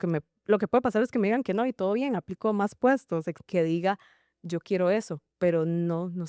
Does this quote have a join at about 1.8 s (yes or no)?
no